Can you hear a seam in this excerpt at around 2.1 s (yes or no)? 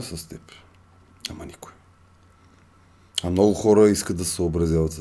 no